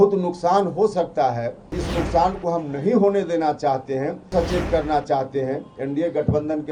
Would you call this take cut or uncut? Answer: cut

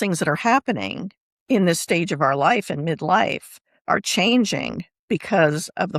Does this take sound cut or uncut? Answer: uncut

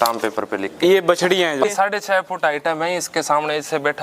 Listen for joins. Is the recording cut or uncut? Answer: cut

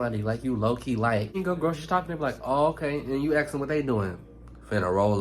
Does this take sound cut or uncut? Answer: cut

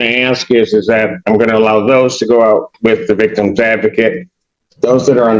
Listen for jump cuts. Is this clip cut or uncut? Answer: uncut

